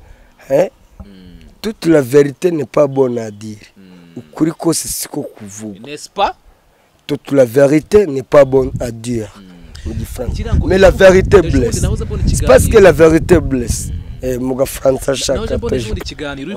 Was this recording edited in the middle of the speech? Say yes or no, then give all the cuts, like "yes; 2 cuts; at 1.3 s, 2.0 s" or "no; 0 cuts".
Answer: no; 0 cuts